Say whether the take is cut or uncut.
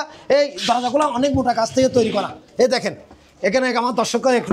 uncut